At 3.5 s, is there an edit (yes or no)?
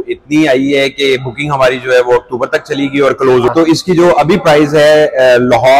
yes